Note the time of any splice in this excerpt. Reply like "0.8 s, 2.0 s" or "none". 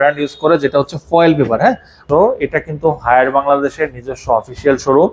2.0 s